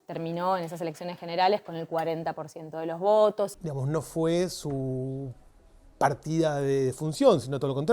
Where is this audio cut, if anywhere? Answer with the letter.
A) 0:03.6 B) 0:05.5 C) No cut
A